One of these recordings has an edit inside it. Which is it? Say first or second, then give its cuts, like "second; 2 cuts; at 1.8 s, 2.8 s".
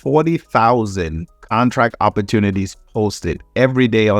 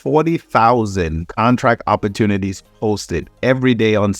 second; 1 cut; at 1.2 s